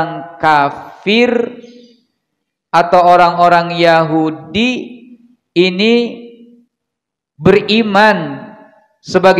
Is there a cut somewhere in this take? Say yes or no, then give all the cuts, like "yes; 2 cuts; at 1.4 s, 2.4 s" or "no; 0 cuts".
no; 0 cuts